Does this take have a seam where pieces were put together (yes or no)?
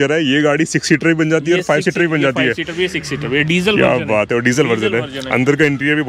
no